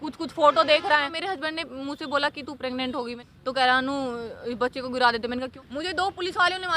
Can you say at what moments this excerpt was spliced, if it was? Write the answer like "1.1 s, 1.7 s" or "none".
1.2 s, 3.1 s, 5.5 s